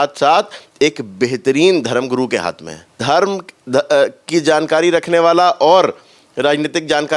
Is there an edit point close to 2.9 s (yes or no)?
yes